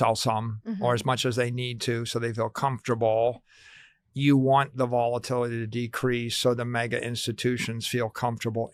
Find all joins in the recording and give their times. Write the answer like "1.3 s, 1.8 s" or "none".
none